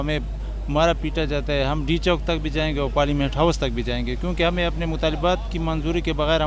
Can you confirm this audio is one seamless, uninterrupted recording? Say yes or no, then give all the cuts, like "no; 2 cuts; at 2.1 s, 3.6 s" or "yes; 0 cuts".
yes; 0 cuts